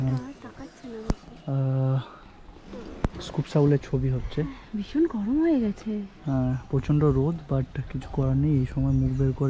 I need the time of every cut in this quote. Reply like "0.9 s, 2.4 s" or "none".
none